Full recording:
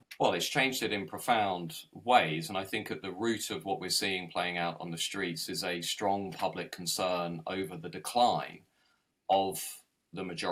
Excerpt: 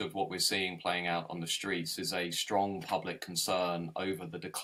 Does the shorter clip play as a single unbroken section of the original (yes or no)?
yes